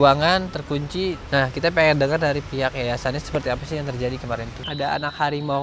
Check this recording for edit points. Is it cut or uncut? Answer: cut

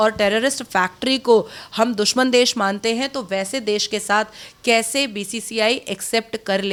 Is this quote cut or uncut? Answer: uncut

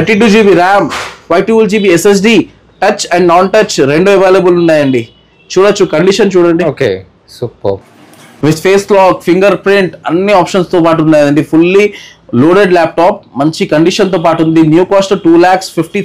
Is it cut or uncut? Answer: uncut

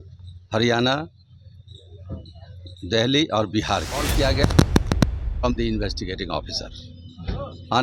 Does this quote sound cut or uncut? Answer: cut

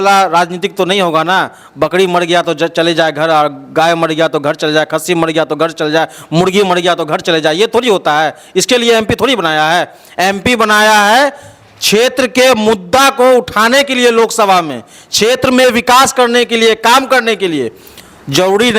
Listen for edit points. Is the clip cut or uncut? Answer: uncut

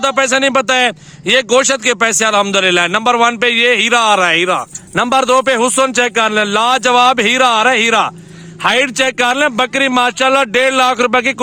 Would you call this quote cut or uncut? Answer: uncut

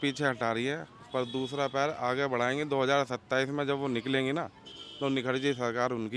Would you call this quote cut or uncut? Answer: uncut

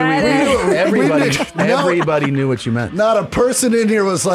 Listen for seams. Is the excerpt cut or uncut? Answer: uncut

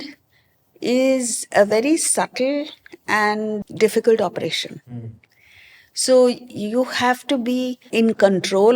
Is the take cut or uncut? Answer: cut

